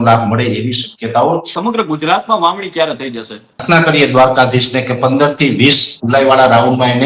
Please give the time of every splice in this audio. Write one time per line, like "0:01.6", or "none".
0:01.5
0:03.6